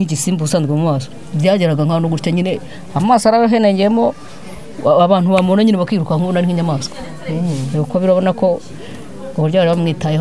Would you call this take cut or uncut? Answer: uncut